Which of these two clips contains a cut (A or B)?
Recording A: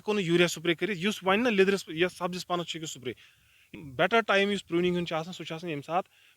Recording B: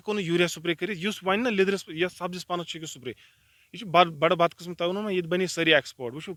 A